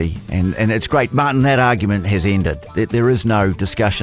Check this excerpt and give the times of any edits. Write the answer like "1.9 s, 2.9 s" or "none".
1.1 s

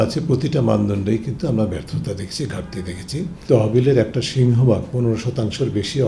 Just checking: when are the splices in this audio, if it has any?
3.4 s

